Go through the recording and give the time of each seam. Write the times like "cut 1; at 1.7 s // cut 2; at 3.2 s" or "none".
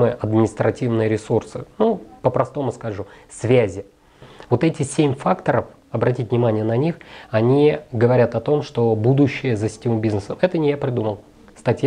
cut 1; at 4.3 s